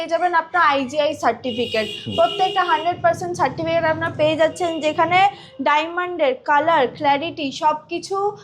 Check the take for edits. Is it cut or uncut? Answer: uncut